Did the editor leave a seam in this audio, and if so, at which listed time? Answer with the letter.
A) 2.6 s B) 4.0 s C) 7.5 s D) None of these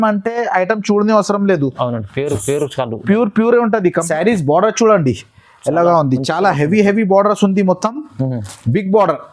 B